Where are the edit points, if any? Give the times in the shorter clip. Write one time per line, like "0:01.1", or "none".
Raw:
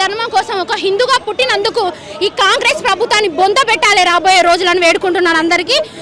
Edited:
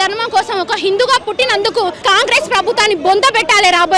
0:02.0